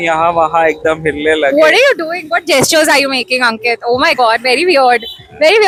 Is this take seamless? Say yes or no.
yes